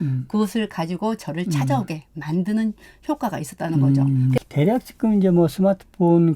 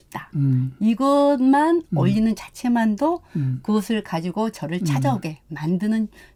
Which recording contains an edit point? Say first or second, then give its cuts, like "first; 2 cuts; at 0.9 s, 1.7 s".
first; 1 cut; at 4.4 s